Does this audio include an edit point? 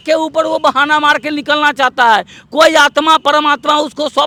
no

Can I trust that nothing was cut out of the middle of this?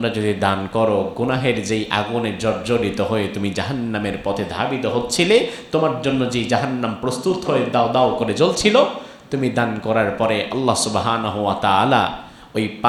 yes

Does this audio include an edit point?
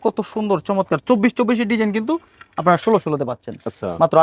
no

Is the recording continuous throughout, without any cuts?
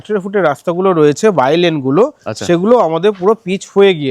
yes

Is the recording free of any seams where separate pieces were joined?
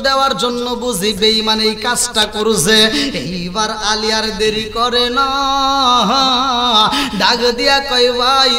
yes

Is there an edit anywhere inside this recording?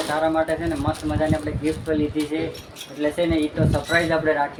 no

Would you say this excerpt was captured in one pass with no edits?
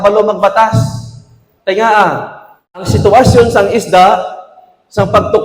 no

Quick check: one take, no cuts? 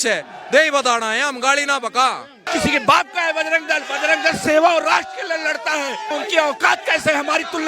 no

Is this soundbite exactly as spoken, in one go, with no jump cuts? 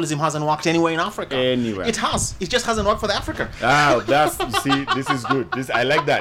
yes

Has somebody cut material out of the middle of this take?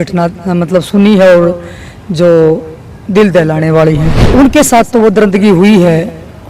yes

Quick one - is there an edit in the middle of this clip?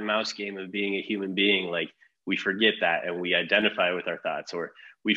no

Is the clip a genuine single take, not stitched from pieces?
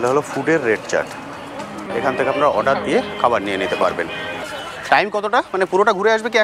no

